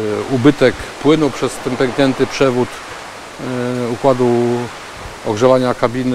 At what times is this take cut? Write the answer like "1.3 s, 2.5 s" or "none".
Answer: none